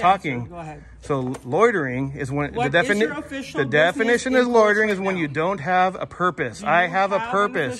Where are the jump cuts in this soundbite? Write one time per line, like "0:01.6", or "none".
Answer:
none